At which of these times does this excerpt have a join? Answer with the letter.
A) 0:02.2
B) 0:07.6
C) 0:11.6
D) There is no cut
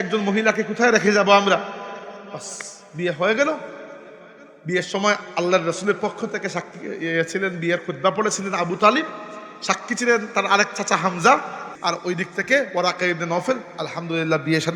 C